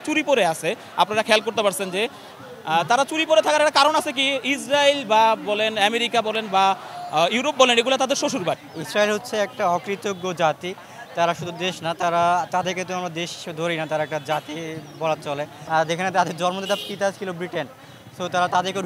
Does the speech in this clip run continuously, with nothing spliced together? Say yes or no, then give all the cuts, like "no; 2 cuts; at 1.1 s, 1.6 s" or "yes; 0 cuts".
no; 2 cuts; at 8.7 s, 15.5 s